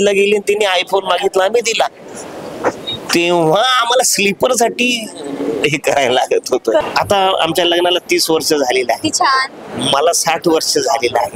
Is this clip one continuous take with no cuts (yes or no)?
no